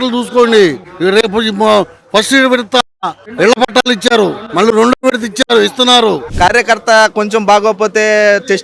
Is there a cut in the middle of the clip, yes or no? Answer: yes